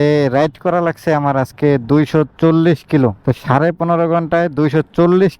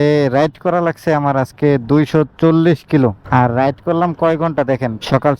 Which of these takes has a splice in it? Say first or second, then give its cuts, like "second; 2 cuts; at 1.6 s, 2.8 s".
first; 1 cut; at 3.2 s